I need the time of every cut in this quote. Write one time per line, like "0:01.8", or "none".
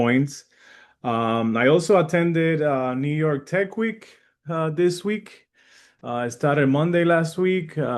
none